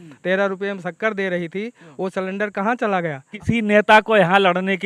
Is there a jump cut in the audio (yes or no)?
yes